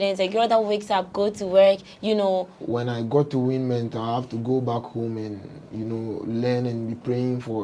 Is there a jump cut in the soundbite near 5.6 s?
no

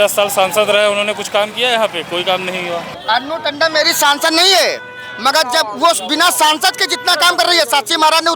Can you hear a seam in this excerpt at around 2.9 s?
yes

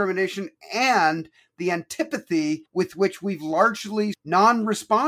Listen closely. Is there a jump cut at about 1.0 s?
no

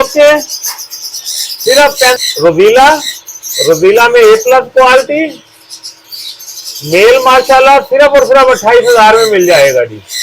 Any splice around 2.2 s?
yes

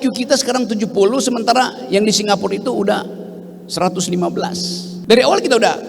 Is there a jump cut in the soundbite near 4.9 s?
yes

